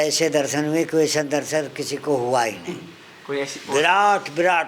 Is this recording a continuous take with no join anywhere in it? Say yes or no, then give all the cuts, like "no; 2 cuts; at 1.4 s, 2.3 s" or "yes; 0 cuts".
yes; 0 cuts